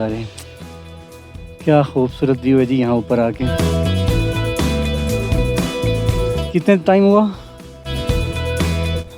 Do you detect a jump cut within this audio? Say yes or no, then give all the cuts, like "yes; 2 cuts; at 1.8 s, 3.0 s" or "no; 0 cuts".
no; 0 cuts